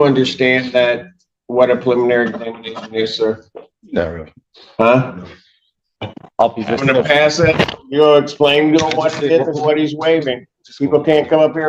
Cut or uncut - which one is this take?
uncut